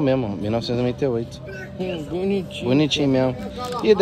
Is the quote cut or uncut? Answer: uncut